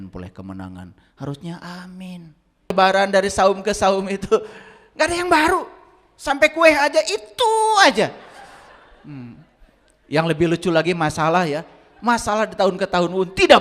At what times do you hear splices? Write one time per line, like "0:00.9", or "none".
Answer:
0:02.7

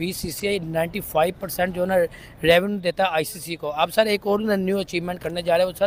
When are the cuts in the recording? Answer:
none

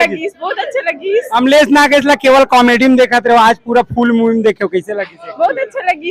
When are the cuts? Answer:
none

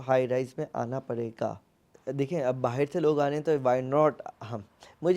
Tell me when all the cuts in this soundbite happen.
0:01.9

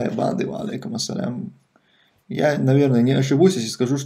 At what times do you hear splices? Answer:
none

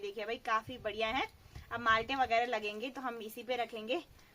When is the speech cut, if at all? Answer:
none

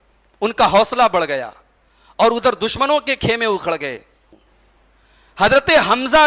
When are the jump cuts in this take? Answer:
0:04.2

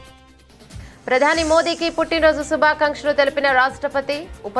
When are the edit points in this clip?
0:00.9

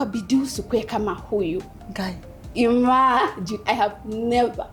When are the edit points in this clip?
none

